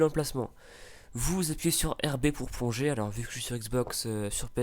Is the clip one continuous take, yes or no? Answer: no